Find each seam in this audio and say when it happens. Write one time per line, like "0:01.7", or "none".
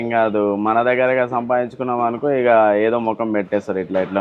none